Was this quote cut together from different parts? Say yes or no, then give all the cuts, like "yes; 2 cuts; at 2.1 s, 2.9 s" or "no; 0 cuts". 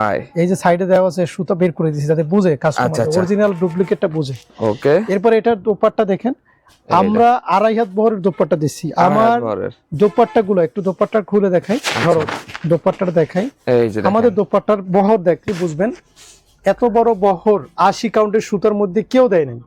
no; 0 cuts